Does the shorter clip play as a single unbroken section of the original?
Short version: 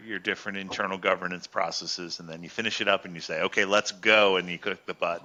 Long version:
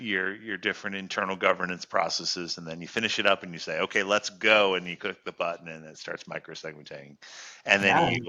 yes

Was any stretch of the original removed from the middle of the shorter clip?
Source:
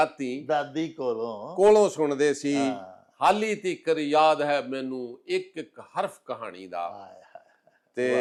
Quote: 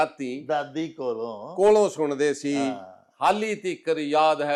no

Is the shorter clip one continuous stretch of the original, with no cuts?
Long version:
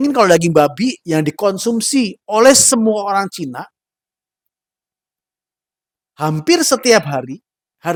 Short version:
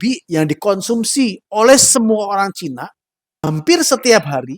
no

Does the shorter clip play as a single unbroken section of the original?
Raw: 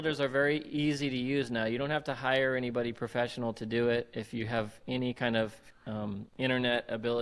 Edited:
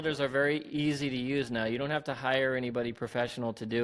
yes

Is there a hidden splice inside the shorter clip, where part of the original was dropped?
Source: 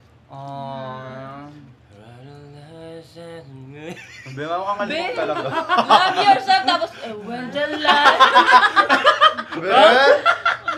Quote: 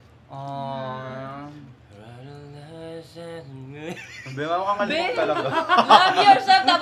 no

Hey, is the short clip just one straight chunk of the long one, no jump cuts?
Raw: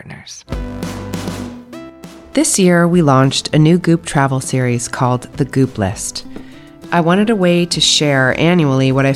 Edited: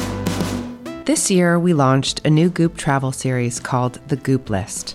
no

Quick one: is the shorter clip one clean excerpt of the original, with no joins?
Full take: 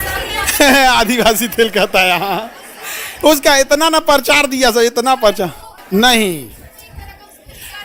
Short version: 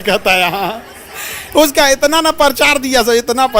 yes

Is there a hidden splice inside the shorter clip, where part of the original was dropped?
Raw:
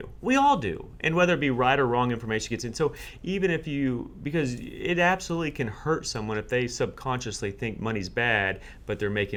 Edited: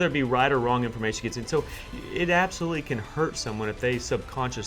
yes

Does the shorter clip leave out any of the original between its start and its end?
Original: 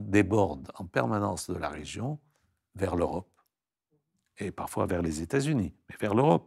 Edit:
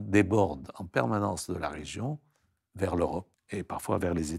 yes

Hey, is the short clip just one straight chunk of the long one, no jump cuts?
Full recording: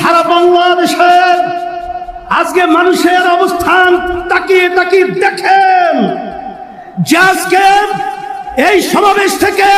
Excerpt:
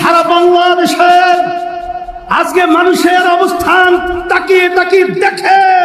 yes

